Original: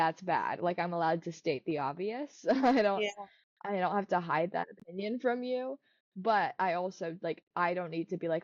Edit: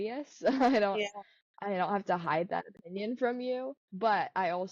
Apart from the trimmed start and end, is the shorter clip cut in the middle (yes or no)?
yes